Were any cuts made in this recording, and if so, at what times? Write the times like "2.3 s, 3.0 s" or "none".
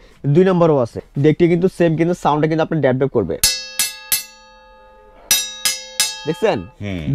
1.0 s